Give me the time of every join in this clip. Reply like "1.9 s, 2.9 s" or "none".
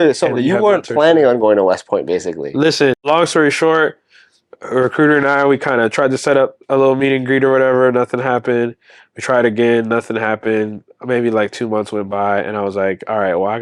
3.0 s